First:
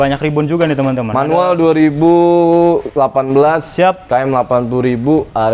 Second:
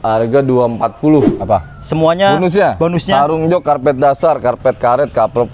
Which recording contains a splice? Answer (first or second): second